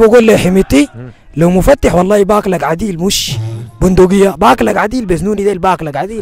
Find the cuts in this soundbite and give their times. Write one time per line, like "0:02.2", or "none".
none